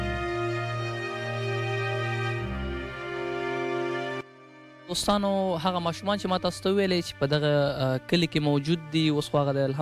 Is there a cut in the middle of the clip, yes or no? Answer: yes